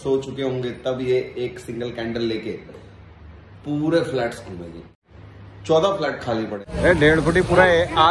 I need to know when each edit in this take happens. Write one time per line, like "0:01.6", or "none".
0:04.8
0:06.6